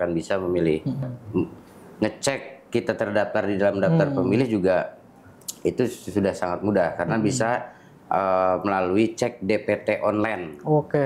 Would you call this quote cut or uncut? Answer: cut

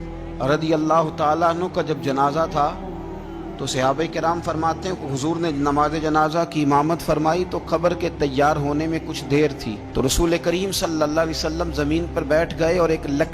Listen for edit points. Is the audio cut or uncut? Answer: uncut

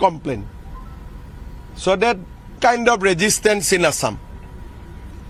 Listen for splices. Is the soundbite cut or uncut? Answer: uncut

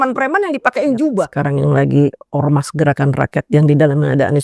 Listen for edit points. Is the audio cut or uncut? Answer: cut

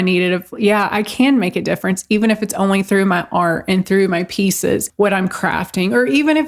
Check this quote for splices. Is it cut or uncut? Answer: uncut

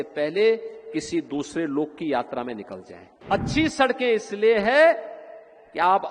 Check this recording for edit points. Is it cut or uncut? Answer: cut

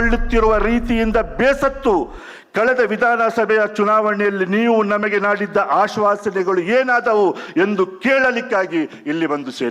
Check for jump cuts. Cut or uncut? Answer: uncut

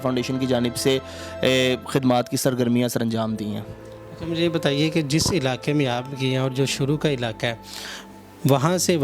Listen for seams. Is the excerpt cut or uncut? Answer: uncut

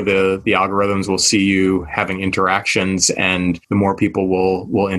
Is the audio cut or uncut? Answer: cut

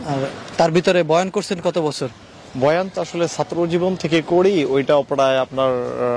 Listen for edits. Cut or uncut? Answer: uncut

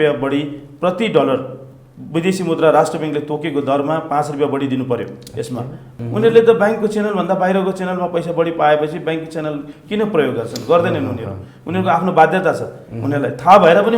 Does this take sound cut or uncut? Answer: cut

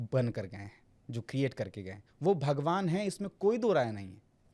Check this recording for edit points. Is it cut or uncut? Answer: uncut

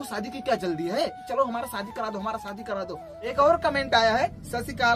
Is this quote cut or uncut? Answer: cut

